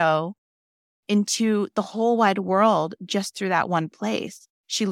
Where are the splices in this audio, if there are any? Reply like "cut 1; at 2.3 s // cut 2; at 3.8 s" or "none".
none